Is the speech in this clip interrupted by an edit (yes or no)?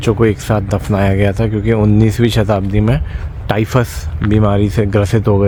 no